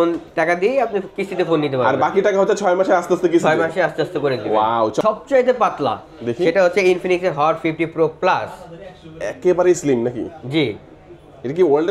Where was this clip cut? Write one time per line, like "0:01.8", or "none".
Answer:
0:05.0